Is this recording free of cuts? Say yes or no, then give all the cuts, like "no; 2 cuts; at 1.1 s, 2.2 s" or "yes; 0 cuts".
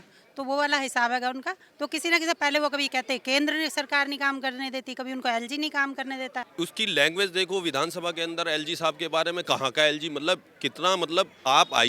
no; 1 cut; at 6.4 s